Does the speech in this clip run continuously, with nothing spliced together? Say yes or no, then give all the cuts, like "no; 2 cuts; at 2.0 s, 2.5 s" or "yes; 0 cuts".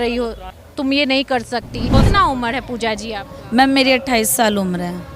no; 1 cut; at 1.9 s